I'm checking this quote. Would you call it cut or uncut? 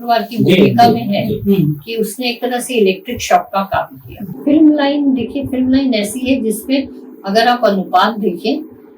cut